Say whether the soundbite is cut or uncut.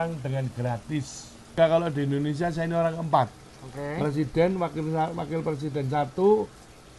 cut